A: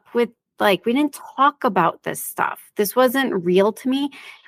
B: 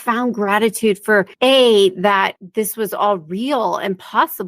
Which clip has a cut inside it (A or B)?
B